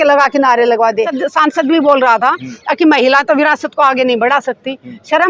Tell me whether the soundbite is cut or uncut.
cut